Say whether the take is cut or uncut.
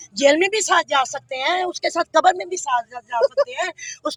uncut